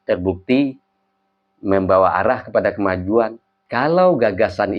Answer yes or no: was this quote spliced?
no